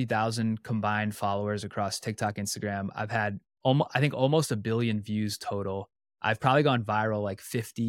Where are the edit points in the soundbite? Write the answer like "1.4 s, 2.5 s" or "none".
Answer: none